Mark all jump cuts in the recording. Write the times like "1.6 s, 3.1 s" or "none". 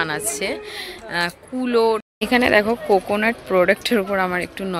2.1 s